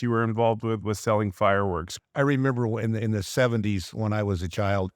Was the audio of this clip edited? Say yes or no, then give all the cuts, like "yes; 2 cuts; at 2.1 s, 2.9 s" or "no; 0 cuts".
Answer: yes; 1 cut; at 1.9 s